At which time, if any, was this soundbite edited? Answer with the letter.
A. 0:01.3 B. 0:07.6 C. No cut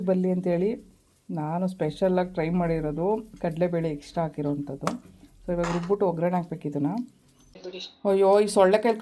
B